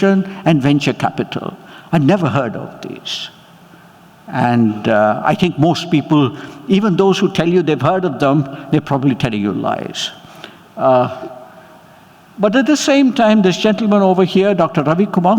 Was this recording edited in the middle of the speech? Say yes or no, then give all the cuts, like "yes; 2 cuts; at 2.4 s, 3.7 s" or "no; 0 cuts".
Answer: no; 0 cuts